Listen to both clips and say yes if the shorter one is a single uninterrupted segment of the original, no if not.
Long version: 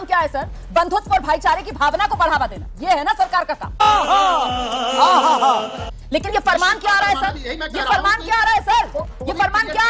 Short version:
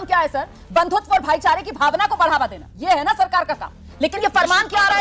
no